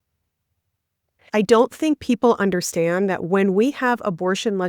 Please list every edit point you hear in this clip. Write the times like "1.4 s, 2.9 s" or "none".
1.3 s